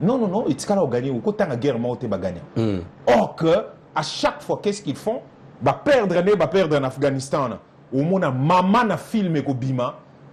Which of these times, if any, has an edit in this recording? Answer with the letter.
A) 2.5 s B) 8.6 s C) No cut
C